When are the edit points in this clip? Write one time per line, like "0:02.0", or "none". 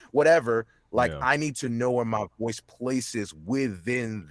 none